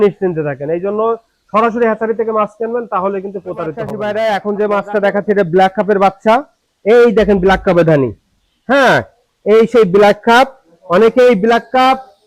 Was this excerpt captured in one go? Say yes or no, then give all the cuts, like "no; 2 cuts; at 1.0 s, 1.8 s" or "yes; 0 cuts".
no; 1 cut; at 3.9 s